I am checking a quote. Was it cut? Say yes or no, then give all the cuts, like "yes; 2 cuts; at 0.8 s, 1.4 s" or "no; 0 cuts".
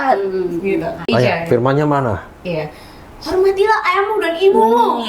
yes; 1 cut; at 1.1 s